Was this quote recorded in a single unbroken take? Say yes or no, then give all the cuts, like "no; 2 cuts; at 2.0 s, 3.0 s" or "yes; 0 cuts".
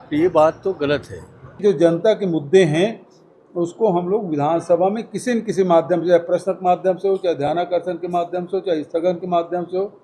no; 1 cut; at 1.6 s